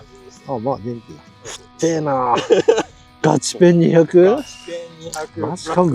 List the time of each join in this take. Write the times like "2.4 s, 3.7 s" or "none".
none